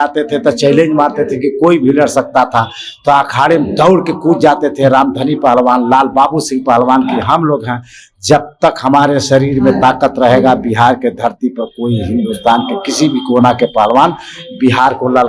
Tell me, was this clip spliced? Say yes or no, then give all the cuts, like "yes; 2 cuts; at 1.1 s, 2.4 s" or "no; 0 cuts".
no; 0 cuts